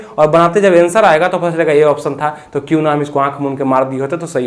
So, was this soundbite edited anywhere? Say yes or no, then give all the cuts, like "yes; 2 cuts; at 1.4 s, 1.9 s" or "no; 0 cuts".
no; 0 cuts